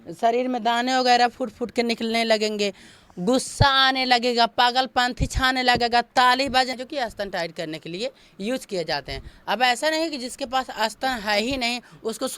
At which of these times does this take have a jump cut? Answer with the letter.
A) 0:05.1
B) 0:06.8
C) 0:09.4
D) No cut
B